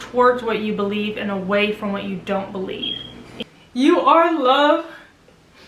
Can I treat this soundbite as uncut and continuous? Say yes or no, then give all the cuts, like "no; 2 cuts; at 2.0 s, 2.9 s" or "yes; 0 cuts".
no; 1 cut; at 3.3 s